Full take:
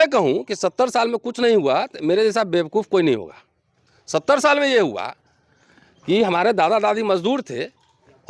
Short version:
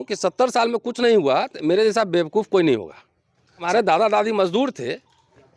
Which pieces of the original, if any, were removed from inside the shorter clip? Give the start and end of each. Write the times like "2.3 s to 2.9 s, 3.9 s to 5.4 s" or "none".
4.0 s to 6.3 s